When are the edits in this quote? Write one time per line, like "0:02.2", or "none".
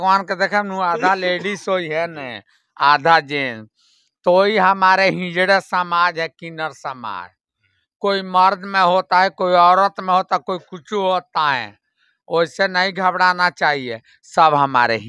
none